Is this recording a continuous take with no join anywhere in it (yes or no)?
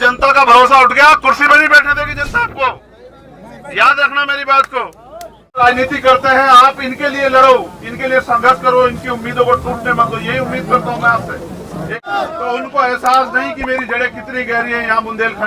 no